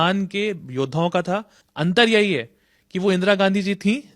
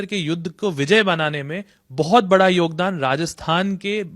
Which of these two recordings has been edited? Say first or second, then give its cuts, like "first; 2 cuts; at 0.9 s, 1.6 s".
first; 1 cut; at 1.6 s